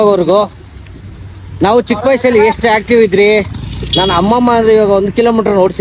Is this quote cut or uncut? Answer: uncut